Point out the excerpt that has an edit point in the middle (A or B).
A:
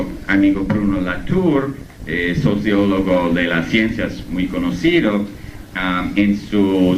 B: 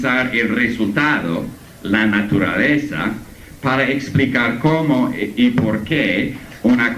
B